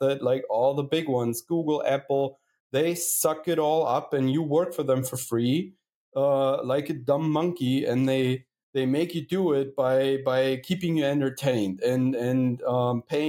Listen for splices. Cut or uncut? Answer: uncut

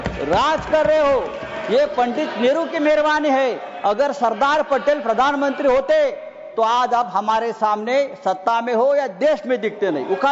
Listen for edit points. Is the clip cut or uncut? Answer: uncut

